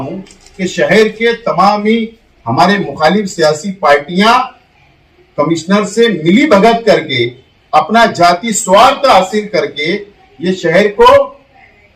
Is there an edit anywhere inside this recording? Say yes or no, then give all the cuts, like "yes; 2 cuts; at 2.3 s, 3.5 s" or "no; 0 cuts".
no; 0 cuts